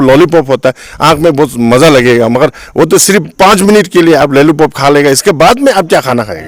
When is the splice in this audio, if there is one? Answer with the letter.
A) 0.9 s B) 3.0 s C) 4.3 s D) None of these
D